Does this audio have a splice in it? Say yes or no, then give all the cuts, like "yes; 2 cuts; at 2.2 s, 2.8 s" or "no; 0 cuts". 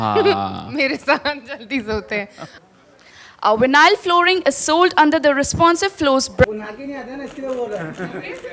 yes; 2 cuts; at 2.5 s, 6.5 s